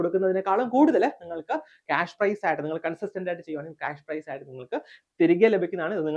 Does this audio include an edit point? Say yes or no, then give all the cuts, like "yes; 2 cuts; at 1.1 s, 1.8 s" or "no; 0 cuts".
no; 0 cuts